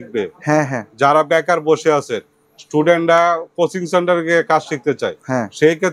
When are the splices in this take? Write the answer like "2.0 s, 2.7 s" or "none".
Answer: none